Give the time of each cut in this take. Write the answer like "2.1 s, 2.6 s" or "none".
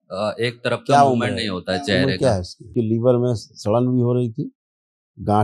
2.7 s